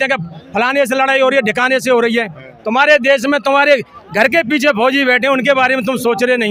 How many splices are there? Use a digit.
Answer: 0